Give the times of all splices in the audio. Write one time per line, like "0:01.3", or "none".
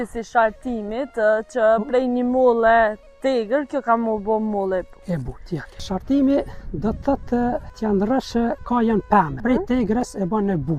0:05.8
0:07.7
0:09.4